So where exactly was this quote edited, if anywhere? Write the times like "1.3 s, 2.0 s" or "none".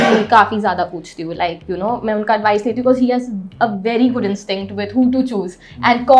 none